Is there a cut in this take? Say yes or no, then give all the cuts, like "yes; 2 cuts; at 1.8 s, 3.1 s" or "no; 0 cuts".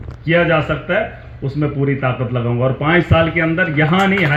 no; 0 cuts